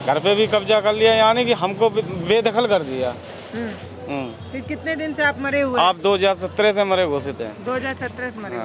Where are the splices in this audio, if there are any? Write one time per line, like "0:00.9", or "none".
none